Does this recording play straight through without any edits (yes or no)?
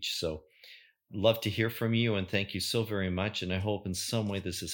yes